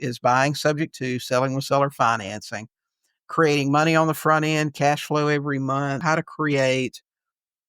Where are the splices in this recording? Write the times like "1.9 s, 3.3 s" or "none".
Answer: 6.0 s

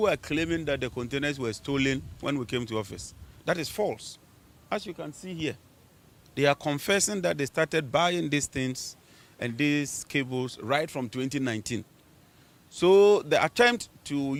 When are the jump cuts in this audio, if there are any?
none

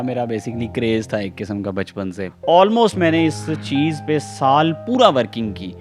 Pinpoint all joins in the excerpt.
2.3 s

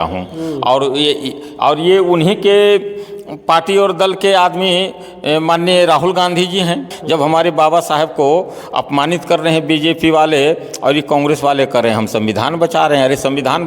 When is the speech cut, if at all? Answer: 6.9 s

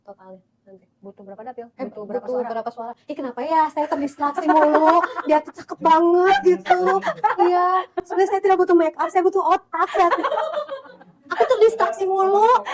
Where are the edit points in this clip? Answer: none

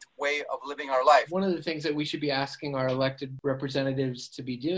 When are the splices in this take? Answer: 1.3 s, 3.3 s

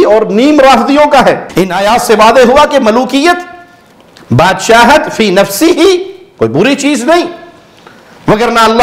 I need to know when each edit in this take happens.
1.4 s

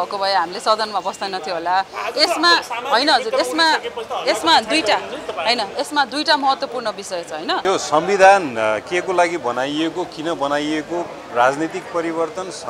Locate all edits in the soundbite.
7.6 s

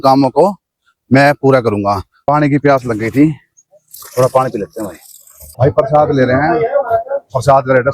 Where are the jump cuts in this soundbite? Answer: 2.1 s, 5.5 s

